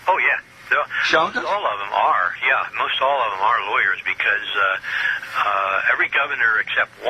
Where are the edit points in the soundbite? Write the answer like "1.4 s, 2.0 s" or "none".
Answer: 5.7 s